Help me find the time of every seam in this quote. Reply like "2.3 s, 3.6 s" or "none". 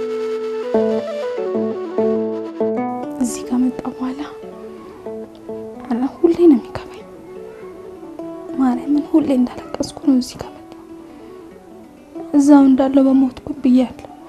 none

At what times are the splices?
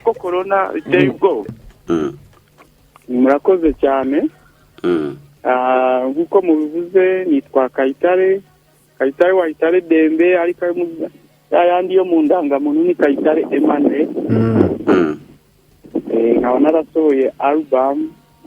1.6 s

